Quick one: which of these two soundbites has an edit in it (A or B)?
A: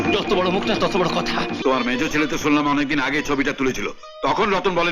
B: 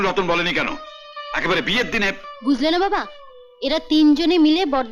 A